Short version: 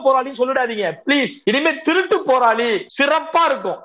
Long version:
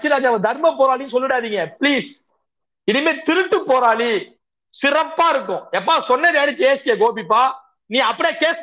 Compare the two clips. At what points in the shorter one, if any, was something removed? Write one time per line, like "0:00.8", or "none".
0:01.3
0:02.9